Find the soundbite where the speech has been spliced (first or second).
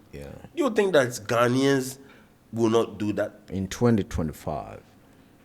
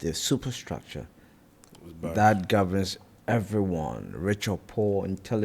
first